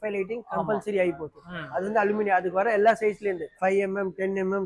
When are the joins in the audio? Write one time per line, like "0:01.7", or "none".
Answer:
none